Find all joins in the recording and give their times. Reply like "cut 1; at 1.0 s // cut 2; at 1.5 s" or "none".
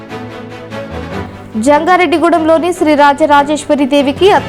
cut 1; at 1.2 s